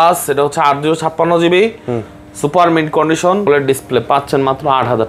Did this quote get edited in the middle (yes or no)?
yes